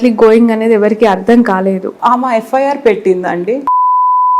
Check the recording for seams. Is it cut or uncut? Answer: cut